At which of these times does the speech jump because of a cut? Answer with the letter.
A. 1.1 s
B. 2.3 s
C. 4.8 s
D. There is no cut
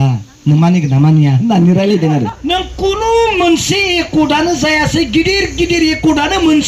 B